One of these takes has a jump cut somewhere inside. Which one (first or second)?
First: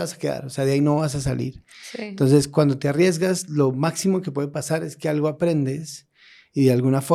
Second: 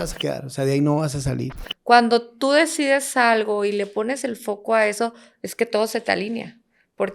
second